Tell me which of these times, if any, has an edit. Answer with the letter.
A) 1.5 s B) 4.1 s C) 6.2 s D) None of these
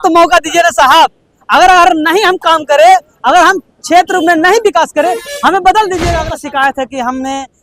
C